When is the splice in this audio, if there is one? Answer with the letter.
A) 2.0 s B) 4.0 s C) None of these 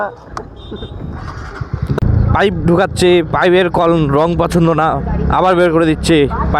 A